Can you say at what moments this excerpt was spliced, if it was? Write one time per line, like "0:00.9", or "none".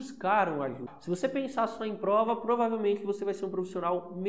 0:00.9